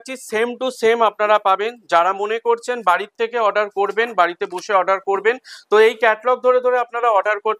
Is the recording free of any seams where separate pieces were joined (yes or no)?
yes